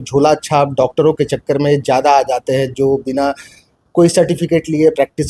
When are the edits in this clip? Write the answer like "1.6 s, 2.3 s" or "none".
none